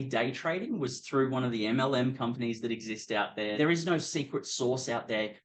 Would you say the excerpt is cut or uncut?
cut